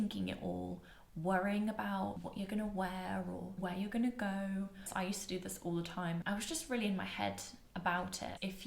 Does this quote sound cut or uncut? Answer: cut